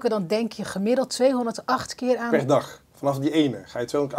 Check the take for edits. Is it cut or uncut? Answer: uncut